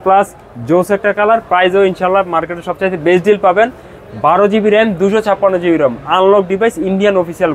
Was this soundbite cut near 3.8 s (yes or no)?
no